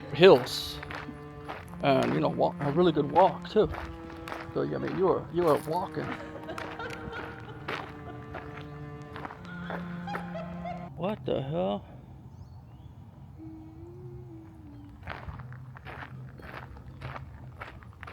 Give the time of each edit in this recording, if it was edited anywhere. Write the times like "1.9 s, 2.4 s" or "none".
none